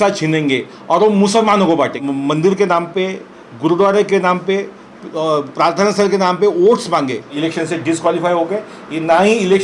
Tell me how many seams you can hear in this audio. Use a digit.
2